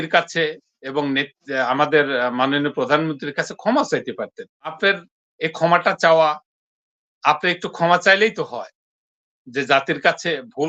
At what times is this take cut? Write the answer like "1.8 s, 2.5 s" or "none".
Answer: 4.8 s